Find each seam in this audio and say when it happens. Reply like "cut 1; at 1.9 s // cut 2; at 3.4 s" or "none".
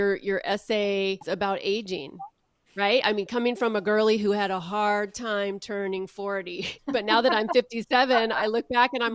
cut 1; at 1.2 s // cut 2; at 6.7 s